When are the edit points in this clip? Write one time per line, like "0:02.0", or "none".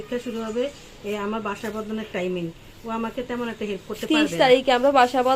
none